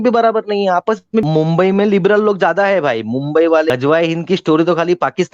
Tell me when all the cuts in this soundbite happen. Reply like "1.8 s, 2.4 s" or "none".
1.2 s, 3.7 s